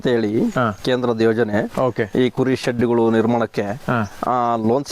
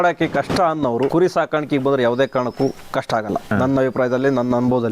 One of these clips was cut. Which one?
second; 2 cuts; at 1.1 s, 3.3 s

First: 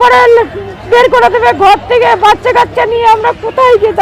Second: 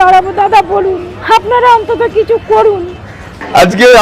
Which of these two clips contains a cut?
second; 1 cut; at 1.1 s

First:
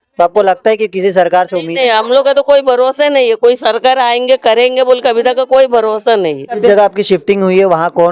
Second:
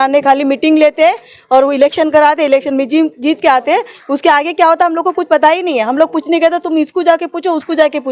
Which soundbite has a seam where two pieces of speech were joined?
first; 1 cut; at 6.6 s

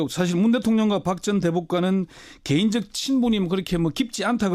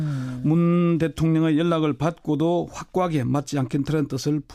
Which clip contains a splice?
second; 1 cut; at 3.4 s

